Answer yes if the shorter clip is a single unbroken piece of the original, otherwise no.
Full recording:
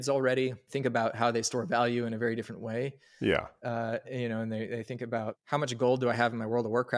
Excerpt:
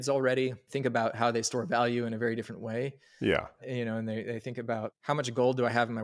no